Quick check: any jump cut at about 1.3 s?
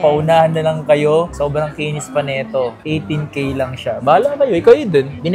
no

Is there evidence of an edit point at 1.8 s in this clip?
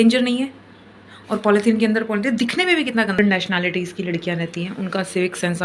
no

